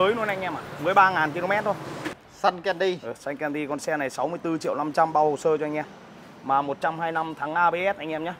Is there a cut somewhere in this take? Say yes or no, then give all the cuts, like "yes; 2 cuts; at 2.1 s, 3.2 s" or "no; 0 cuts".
yes; 1 cut; at 2.2 s